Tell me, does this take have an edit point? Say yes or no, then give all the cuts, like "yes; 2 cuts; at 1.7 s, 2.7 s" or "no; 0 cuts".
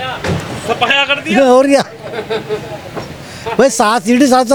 no; 0 cuts